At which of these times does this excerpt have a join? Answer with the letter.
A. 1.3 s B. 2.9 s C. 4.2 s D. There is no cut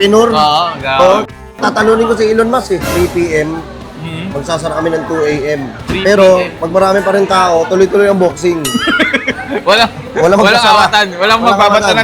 B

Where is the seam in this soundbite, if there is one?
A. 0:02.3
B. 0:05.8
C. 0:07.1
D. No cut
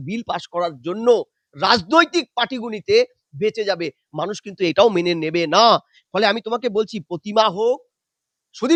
D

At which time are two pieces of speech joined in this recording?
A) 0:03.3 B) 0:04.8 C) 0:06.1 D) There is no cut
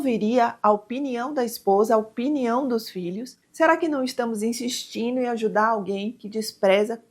A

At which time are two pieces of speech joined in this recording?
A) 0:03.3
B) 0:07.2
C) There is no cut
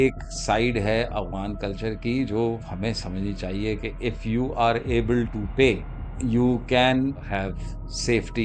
B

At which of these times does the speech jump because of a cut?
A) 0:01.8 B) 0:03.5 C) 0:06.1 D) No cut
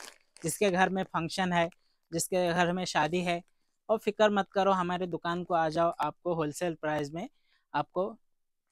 D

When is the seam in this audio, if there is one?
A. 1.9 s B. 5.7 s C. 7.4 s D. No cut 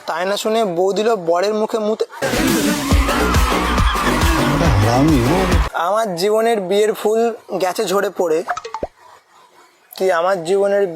B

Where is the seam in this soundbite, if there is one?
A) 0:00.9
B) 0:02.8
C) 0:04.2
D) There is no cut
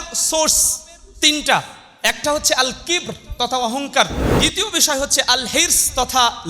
C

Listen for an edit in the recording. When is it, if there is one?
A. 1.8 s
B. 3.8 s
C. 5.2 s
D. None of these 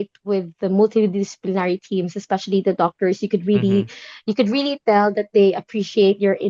D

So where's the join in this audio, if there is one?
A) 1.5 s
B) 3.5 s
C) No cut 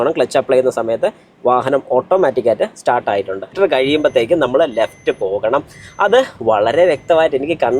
B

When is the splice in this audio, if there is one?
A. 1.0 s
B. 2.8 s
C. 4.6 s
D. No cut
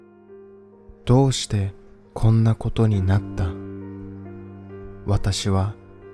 A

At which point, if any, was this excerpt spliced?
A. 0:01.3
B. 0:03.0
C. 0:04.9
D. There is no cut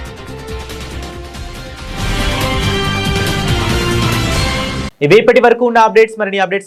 D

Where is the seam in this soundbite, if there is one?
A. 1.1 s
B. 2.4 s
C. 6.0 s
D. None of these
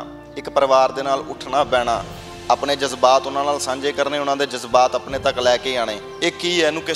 C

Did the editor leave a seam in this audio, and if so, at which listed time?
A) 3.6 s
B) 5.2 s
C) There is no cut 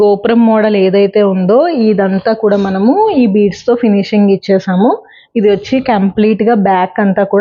C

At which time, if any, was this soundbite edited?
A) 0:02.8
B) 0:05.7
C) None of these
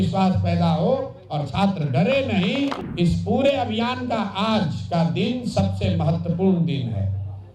A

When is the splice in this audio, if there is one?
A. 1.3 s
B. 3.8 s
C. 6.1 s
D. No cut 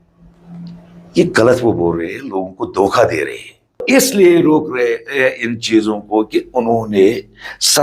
B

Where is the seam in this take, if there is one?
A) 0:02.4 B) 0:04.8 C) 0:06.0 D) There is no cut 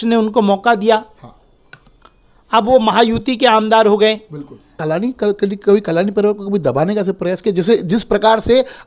B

